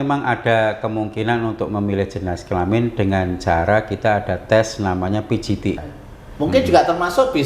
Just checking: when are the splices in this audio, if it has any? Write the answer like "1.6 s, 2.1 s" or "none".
5.8 s

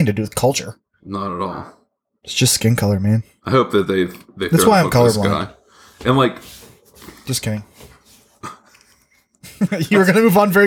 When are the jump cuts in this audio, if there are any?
3.3 s

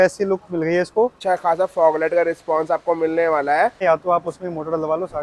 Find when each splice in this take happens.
1.2 s, 3.8 s

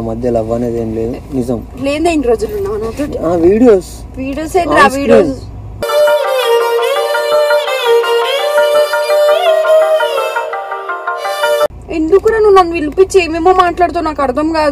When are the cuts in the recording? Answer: 11.7 s

